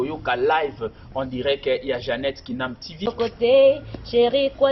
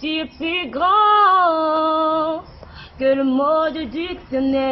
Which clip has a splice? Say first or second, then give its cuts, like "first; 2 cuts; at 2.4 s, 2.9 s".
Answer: first; 1 cut; at 3.1 s